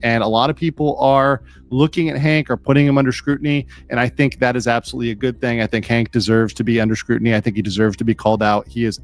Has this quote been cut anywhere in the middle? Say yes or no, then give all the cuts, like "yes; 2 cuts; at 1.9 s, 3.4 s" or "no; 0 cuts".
no; 0 cuts